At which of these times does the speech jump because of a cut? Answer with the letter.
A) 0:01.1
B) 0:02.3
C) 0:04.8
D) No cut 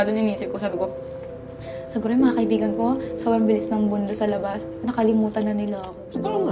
D